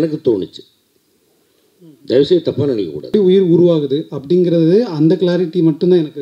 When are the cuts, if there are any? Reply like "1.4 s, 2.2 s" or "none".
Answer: 3.1 s